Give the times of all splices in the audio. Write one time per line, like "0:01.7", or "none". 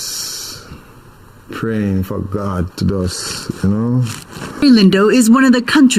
0:04.6